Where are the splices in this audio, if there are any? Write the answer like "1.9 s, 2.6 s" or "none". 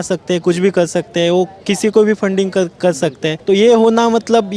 3.3 s